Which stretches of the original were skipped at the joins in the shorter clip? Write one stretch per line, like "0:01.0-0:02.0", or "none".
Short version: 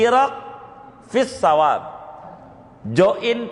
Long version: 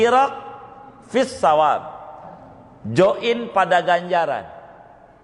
none